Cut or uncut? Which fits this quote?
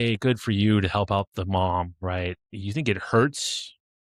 uncut